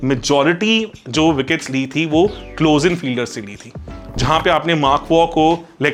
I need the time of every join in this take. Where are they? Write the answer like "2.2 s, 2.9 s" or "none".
none